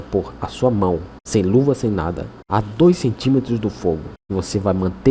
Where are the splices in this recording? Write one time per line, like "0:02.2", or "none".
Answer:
0:01.1
0:02.3
0:04.1